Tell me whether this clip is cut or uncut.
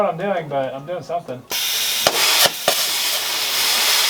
uncut